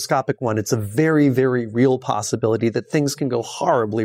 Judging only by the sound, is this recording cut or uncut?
uncut